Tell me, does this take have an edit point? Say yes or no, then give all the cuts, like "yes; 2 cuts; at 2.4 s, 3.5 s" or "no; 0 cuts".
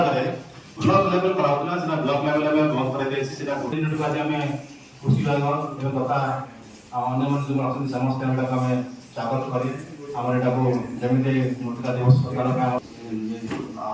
no; 0 cuts